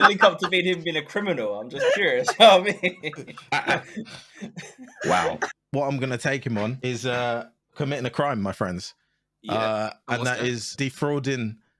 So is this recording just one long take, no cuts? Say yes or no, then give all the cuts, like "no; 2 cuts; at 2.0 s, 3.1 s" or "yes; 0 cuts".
no; 3 cuts; at 5.6 s, 6.8 s, 10.7 s